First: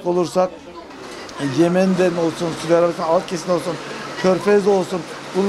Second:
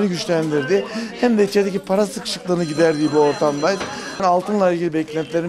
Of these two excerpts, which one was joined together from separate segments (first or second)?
second